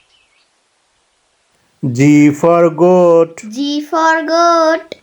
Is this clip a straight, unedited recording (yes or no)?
no